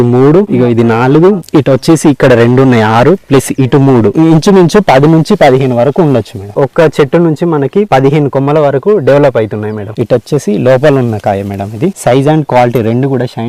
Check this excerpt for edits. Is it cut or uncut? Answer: uncut